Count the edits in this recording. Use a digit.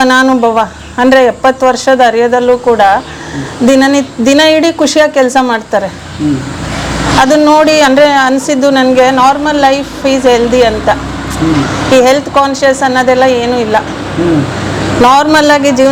0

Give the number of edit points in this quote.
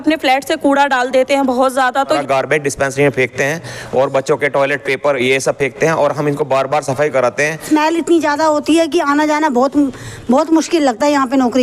2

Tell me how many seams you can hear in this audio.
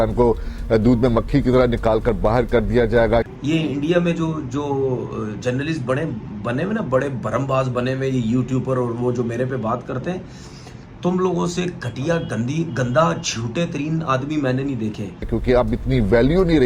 0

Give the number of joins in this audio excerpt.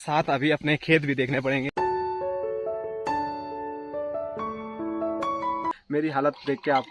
2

